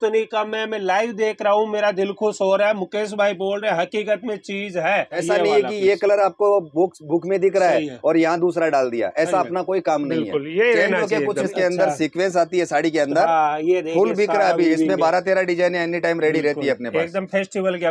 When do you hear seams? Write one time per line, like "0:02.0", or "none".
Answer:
0:05.2
0:11.5